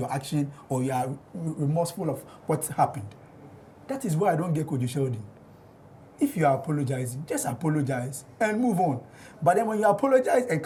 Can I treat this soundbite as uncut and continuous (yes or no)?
yes